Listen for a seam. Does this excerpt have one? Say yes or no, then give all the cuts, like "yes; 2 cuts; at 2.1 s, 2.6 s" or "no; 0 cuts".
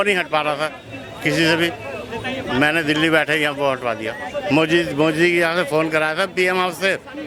no; 0 cuts